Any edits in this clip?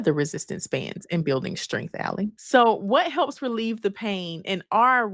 yes; 1 cut; at 2.4 s

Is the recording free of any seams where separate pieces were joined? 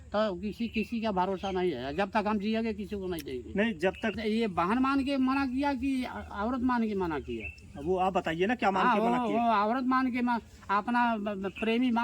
no; 1 cut; at 4.1 s

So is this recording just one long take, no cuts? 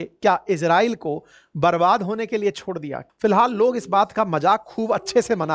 no; 1 cut; at 3.0 s

